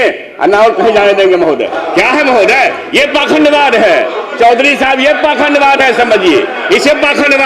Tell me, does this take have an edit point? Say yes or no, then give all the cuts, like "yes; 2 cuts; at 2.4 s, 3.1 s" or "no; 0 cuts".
no; 0 cuts